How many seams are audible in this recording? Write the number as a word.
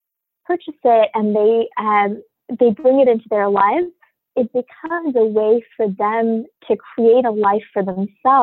zero